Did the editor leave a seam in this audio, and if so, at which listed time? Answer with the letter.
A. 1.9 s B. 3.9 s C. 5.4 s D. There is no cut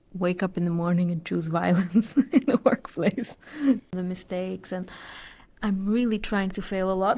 B